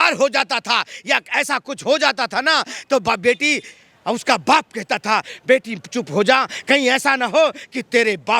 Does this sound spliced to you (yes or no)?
no